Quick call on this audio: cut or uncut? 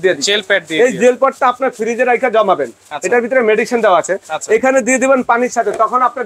uncut